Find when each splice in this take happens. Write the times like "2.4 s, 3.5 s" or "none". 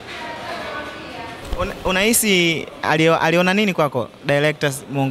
1.4 s